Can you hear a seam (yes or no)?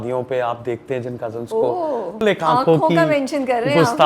yes